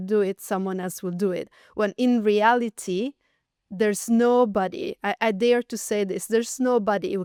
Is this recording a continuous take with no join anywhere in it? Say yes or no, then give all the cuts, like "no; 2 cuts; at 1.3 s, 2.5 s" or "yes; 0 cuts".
yes; 0 cuts